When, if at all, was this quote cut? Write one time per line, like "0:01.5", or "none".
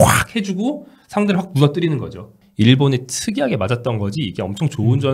0:02.4